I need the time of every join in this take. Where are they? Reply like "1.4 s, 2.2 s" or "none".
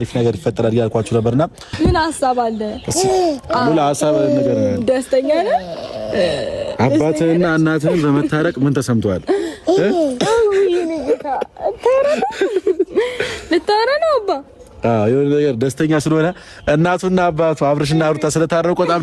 1.7 s